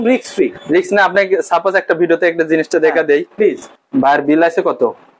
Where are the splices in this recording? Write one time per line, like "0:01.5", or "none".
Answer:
0:03.7